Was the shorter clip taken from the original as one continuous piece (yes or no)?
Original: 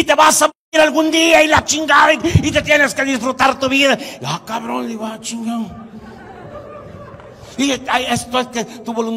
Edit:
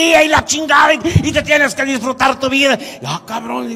yes